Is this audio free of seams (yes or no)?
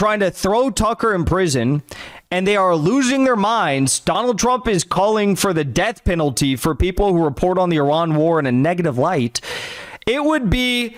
yes